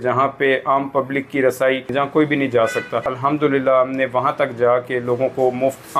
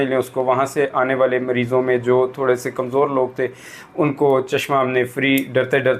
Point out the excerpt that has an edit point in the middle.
first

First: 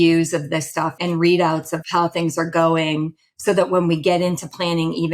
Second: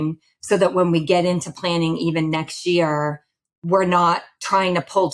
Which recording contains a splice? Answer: first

